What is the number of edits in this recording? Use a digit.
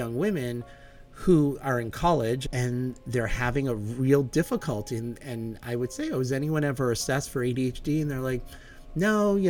1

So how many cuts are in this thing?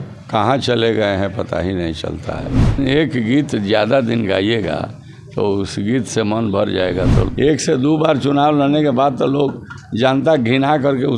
2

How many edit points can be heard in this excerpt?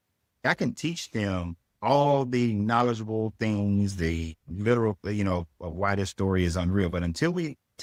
0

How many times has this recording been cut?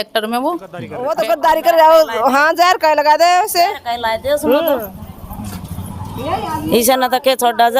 1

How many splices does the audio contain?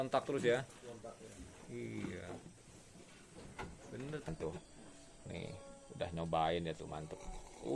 1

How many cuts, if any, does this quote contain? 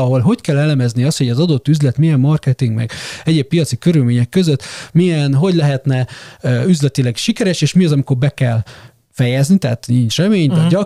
0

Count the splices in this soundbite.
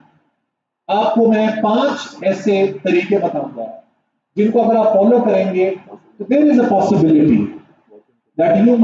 0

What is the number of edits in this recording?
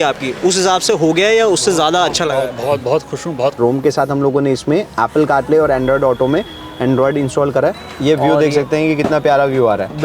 2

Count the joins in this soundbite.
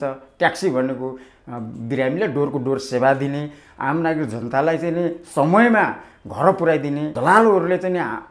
1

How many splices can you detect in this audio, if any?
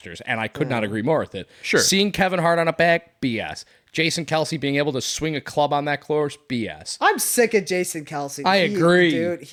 0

